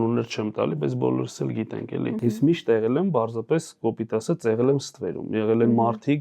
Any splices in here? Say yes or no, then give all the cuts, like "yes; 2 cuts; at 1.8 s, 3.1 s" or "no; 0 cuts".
yes; 1 cut; at 2.2 s